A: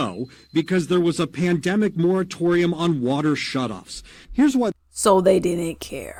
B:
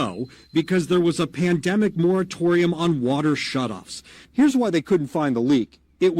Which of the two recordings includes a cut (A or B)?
B